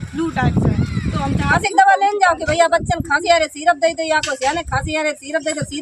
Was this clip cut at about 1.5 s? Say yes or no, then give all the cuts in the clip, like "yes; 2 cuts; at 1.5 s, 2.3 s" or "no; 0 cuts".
yes; 1 cut; at 1.5 s